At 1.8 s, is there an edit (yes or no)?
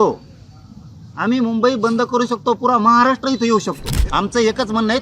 no